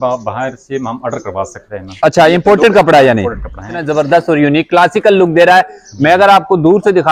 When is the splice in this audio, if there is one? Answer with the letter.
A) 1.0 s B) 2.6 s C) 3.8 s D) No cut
C